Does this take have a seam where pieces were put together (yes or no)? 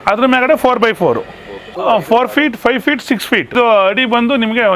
yes